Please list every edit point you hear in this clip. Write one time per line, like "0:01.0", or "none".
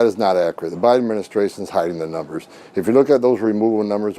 0:02.5